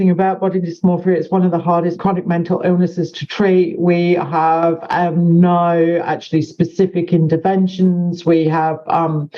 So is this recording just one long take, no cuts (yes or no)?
no